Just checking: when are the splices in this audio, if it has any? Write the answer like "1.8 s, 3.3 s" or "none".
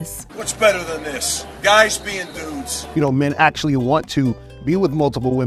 2.9 s